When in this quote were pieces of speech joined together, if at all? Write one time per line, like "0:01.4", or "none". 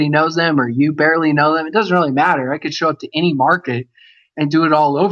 none

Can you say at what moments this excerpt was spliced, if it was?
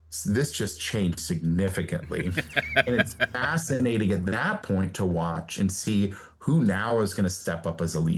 none

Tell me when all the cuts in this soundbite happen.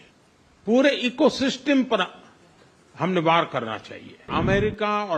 0:04.2

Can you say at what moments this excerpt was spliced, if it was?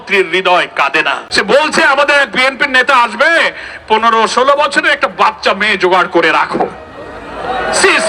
0:01.2

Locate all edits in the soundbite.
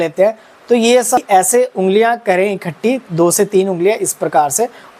0:01.2

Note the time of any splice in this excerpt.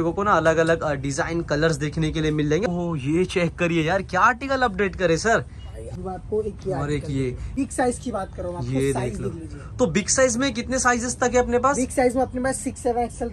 0:02.7
0:05.9
0:07.5

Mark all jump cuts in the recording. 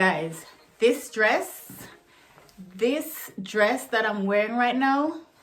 none

